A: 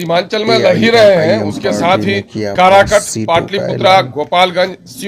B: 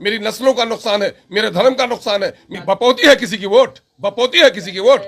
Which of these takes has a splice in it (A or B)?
B